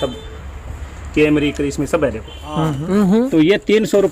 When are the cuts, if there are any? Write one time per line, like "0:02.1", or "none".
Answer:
0:02.7